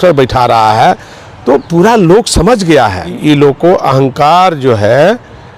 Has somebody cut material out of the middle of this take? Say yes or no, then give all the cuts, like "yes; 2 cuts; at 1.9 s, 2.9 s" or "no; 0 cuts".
yes; 1 cut; at 3.1 s